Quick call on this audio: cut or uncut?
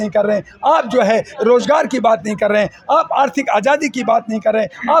uncut